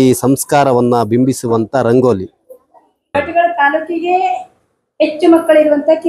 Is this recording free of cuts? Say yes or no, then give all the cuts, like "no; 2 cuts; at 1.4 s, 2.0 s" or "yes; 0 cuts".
no; 1 cut; at 3.1 s